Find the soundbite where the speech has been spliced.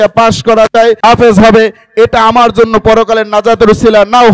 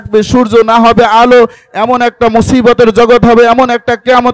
first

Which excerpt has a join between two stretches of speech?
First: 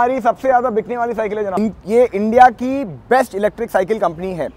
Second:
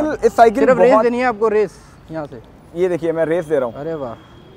first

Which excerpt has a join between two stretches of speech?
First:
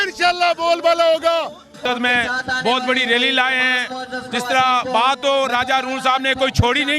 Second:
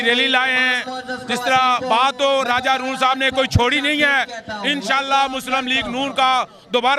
first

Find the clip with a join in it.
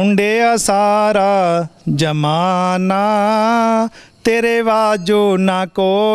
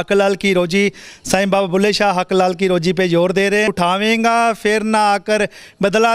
second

